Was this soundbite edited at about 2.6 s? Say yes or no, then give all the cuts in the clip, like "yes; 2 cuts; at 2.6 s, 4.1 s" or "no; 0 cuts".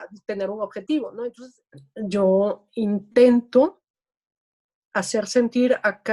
no; 1 cut; at 1.3 s